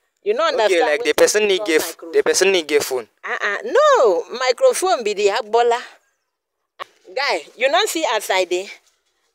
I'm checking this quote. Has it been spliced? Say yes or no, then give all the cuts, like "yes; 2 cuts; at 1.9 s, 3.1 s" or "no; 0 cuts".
yes; 1 cut; at 6.8 s